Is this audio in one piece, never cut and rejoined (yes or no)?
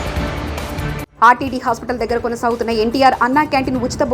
no